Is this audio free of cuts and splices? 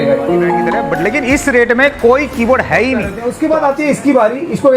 no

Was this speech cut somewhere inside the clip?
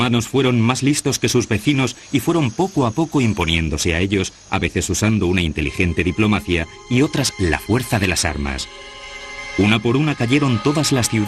no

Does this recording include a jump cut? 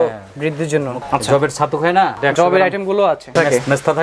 yes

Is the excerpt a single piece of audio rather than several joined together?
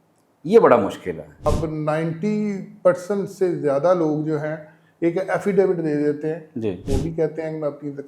no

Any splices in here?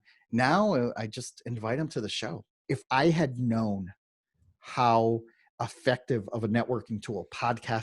yes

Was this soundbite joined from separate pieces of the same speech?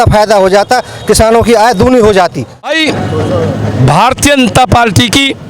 yes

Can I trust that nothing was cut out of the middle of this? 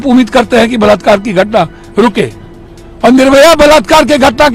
yes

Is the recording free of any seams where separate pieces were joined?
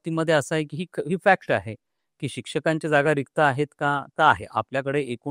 yes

